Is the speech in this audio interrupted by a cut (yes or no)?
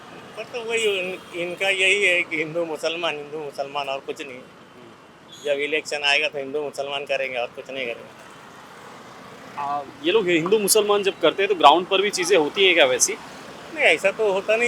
no